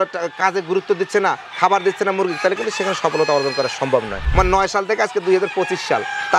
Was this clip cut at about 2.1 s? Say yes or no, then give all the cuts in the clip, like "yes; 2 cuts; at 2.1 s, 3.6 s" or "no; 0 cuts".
no; 1 cut; at 4.2 s